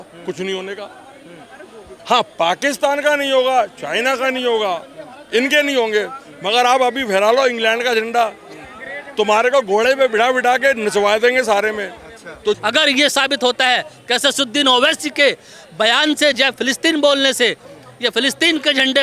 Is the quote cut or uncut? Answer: cut